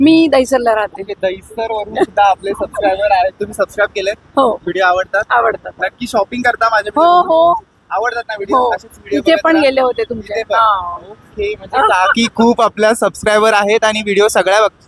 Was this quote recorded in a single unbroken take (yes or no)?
yes